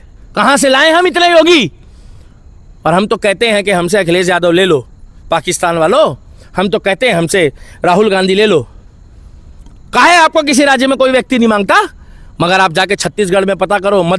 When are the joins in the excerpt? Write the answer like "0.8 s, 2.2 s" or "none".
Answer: none

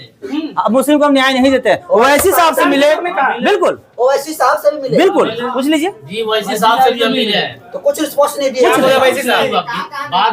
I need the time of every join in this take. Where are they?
none

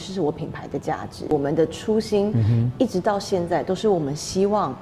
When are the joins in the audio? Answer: 1.3 s

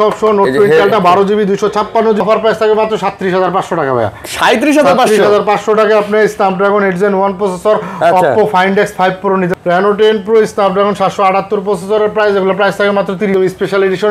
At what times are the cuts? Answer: 2.2 s, 9.5 s, 13.3 s

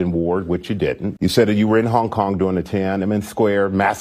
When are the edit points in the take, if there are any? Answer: 1.1 s

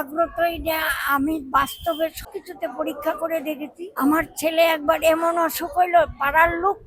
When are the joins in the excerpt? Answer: 2.2 s, 3.9 s

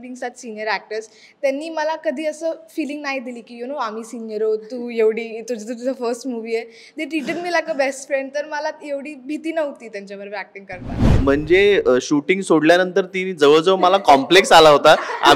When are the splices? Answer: 11.0 s

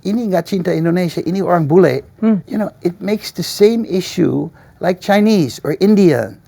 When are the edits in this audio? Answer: 2.5 s

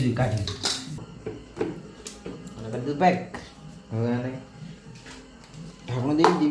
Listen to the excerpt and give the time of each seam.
1.1 s

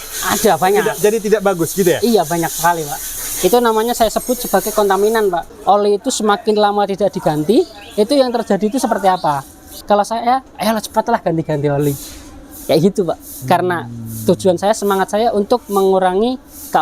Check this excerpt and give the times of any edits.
5.4 s, 9.8 s

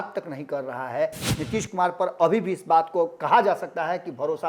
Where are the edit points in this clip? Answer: 1.2 s

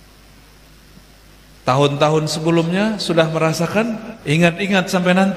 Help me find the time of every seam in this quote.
4.1 s

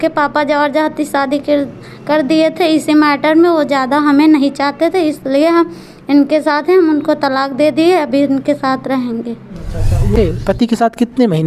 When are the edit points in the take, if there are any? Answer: 10.1 s

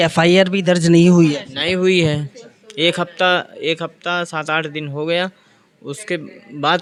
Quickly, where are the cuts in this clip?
none

